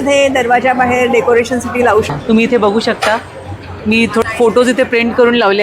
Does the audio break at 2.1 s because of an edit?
yes; 2 cuts; at 2.1 s, 4.2 s

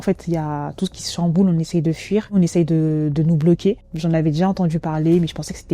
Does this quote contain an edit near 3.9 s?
yes; 2 cuts; at 2.4 s, 3.9 s

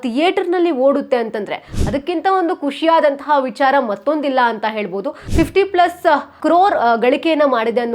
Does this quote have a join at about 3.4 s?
no; 1 cut; at 5.2 s

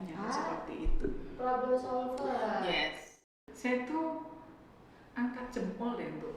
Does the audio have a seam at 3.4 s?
yes; 1 cut; at 3.4 s

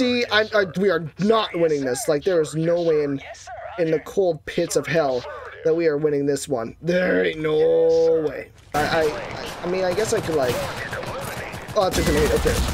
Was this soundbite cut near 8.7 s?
yes; 1 cut; at 8.7 s

